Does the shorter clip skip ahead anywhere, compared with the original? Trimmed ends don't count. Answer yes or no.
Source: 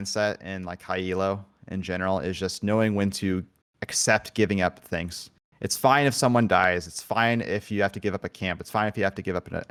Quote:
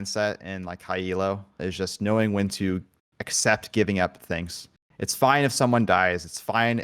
yes